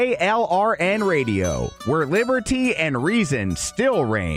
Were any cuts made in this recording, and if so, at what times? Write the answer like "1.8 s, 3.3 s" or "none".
none